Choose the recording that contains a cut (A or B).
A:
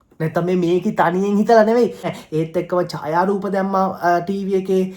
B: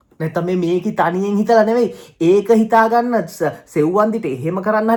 A